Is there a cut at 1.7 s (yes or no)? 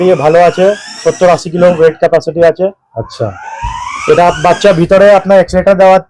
no